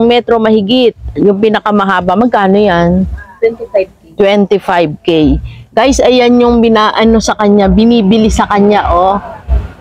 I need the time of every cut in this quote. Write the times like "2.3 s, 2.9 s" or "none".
none